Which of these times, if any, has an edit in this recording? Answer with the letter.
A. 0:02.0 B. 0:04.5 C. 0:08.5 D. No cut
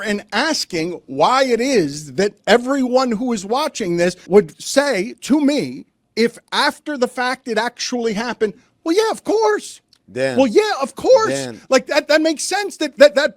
B